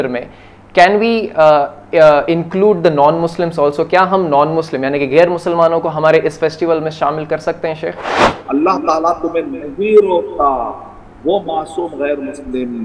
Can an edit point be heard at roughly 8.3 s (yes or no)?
yes